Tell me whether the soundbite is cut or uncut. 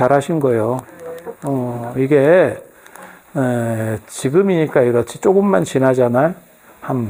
uncut